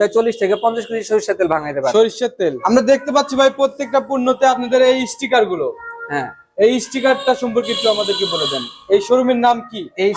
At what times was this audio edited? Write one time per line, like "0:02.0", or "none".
0:02.6